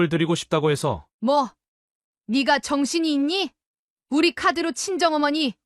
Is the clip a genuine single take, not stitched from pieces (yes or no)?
yes